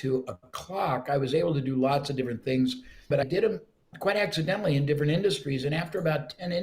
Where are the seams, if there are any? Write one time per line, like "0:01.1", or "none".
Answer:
0:03.2